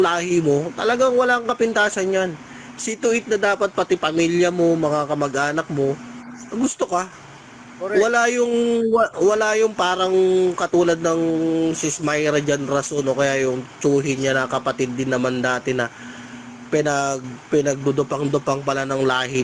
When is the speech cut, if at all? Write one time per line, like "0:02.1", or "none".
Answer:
none